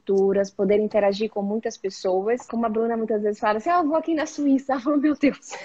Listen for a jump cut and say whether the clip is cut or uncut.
cut